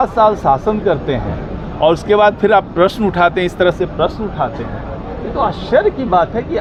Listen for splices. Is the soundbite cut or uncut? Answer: uncut